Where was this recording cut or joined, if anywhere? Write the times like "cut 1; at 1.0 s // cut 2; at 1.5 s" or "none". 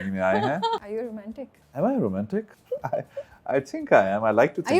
cut 1; at 0.8 s // cut 2; at 2.6 s